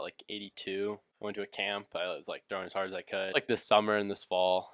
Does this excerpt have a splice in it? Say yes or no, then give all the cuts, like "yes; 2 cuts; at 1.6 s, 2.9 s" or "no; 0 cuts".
yes; 2 cuts; at 1.1 s, 3.3 s